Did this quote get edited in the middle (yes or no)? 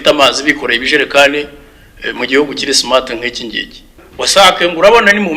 yes